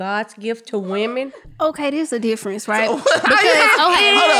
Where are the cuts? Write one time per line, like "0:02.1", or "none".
0:01.4